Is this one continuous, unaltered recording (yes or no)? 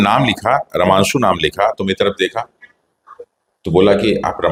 yes